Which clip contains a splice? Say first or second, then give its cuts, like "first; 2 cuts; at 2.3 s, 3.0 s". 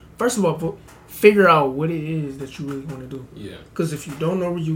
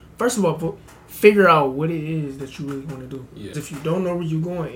second; 1 cut; at 3.5 s